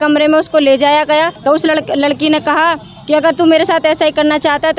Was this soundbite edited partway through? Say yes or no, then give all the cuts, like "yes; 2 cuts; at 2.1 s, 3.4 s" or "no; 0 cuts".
yes; 1 cut; at 1.3 s